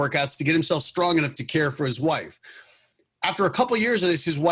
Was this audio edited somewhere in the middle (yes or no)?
no